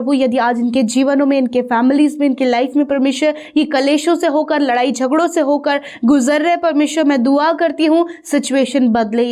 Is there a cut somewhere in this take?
no; 0 cuts

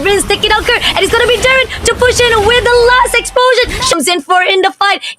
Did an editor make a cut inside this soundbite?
yes; 1 cut; at 3.9 s

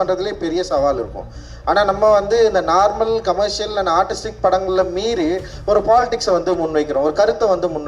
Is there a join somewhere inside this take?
no; 0 cuts

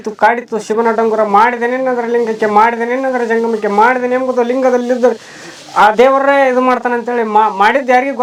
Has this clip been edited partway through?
no; 0 cuts

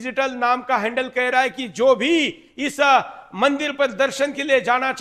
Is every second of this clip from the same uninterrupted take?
yes; 0 cuts

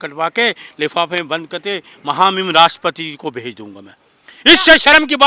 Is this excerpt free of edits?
yes; 0 cuts

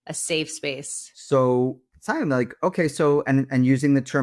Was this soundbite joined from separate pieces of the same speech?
no; 0 cuts

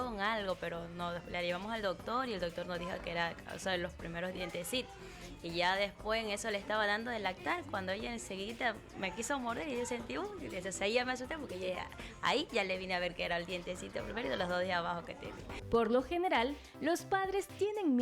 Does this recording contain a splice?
no; 0 cuts

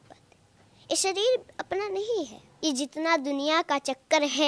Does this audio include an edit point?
yes; 1 cut; at 2.4 s

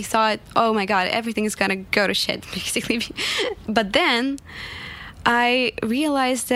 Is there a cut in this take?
yes; 2 cuts; at 1.8 s, 3.6 s

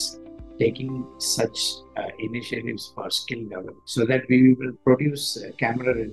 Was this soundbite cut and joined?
no; 0 cuts

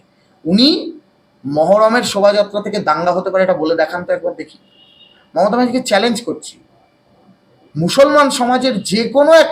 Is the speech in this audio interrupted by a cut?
no; 0 cuts

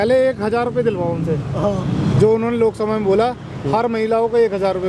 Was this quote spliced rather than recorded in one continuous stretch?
no; 0 cuts

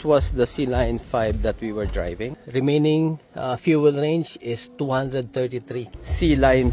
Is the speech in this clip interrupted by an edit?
yes; 2 cuts; at 2.4 s, 5.9 s

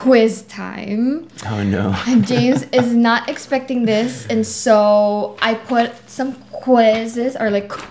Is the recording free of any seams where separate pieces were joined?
yes; 0 cuts

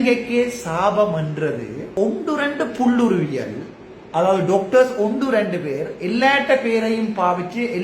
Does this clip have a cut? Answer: yes; 1 cut; at 1.9 s

